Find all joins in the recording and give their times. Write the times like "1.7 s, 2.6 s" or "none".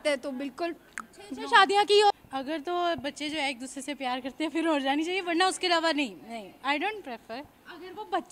2.2 s